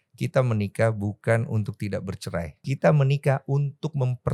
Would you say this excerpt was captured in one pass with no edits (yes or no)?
no